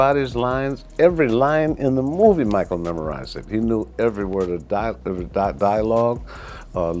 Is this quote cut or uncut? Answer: uncut